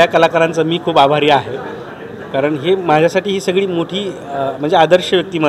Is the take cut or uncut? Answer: uncut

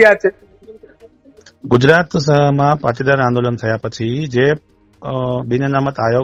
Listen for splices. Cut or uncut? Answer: uncut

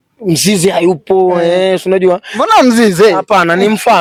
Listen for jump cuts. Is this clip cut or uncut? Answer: uncut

